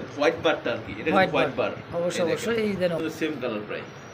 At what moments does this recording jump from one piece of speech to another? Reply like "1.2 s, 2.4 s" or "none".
3.0 s